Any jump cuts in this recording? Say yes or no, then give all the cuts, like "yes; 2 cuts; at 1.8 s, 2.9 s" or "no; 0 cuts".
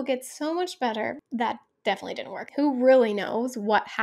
yes; 2 cuts; at 1.2 s, 2.4 s